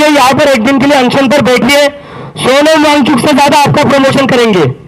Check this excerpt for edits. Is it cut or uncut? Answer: uncut